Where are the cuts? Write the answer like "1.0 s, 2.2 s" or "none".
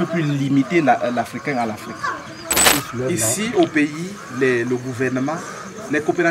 2.7 s

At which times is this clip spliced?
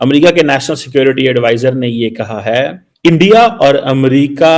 2.8 s

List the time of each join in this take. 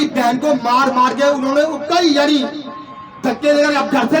none

